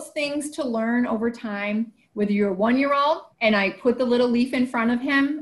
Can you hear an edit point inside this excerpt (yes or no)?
yes